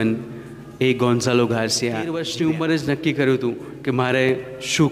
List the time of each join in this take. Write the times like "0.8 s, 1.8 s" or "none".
2.2 s